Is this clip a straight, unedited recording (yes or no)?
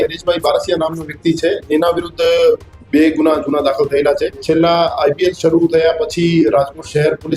no